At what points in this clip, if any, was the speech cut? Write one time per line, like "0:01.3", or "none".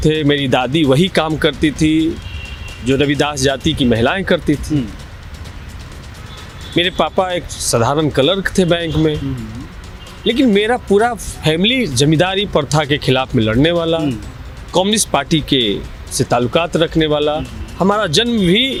none

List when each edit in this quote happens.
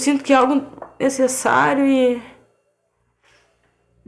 none

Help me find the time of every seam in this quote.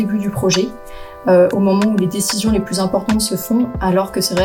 none

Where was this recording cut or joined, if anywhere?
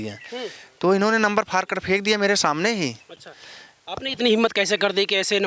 none

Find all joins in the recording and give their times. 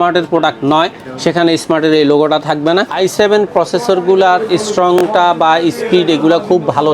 0:02.9

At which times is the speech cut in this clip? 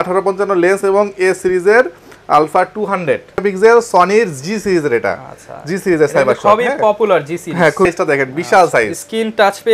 0:03.4
0:07.9

